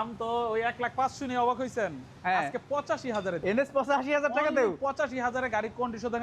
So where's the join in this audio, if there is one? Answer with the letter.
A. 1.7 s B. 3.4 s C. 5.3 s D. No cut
B